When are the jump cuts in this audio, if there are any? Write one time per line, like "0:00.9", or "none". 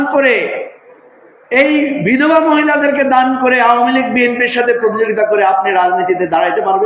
none